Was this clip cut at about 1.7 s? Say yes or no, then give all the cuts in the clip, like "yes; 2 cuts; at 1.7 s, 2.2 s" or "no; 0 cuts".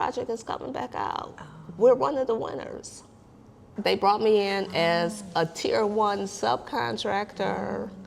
no; 1 cut; at 3.7 s